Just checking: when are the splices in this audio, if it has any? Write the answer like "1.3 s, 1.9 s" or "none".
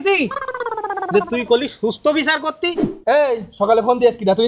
2.9 s